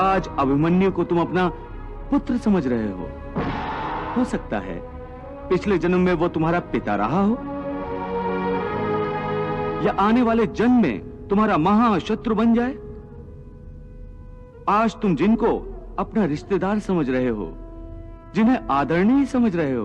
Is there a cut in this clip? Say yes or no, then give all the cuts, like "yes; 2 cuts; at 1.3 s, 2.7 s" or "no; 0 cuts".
yes; 1 cut; at 4.1 s